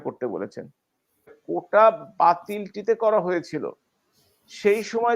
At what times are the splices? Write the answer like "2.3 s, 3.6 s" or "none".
1.3 s